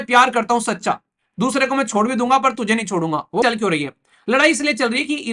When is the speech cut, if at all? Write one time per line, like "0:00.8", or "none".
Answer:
0:03.4